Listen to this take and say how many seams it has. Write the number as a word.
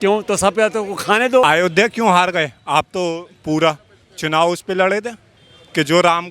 one